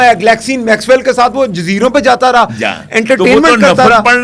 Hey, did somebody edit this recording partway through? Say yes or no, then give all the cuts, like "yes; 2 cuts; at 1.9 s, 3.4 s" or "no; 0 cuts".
no; 0 cuts